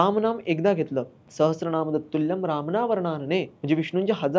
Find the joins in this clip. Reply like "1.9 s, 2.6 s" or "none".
1.2 s, 3.5 s